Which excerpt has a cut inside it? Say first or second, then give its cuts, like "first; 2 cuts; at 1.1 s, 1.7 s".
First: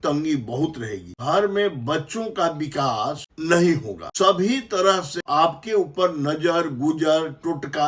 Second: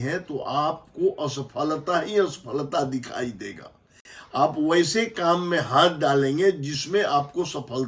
first; 4 cuts; at 1.1 s, 3.3 s, 4.0 s, 5.2 s